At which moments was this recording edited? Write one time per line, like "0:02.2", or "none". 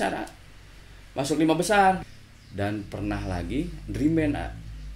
0:02.1